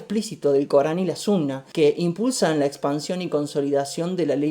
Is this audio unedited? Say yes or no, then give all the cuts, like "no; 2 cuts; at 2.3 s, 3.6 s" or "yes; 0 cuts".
no; 1 cut; at 1.6 s